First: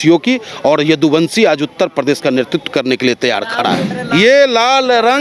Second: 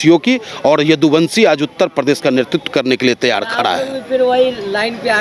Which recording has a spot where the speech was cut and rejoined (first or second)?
first